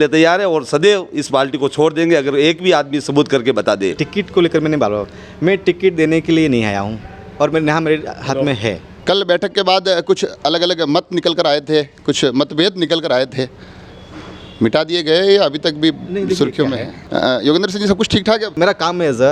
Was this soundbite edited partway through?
yes; 4 cuts; at 4.0 s, 8.9 s, 17.0 s, 18.6 s

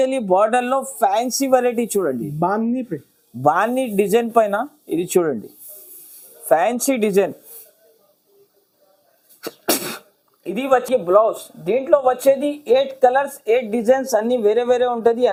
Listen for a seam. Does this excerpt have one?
no; 0 cuts

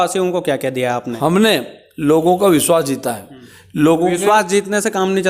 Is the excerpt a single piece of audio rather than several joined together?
no; 1 cut; at 1.1 s

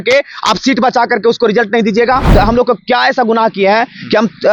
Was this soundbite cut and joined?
yes; 1 cut; at 2.3 s

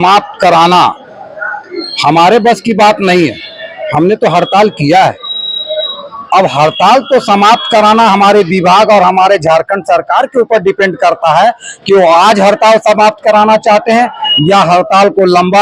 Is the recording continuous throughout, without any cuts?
yes; 0 cuts

